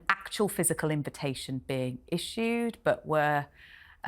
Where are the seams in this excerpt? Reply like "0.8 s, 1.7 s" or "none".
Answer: none